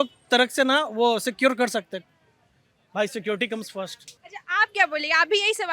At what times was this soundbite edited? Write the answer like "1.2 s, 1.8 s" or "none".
none